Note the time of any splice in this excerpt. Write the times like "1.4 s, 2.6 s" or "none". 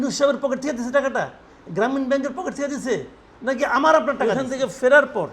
4.2 s